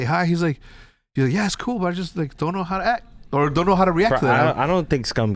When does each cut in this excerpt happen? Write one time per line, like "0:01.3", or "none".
none